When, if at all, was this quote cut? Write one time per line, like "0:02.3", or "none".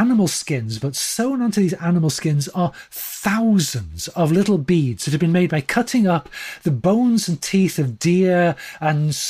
none